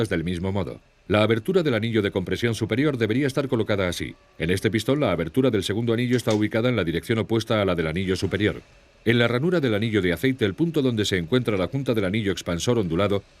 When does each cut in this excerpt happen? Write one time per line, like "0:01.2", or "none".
0:11.5